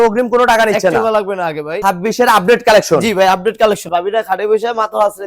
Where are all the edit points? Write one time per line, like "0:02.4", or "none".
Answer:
0:01.7
0:03.9